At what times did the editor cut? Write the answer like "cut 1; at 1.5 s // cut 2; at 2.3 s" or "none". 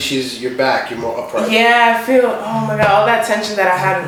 none